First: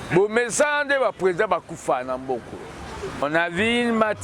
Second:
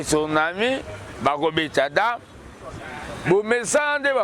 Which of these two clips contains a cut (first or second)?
first